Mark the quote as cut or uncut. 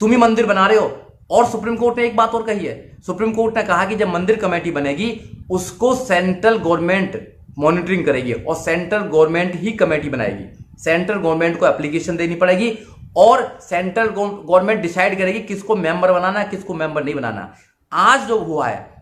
uncut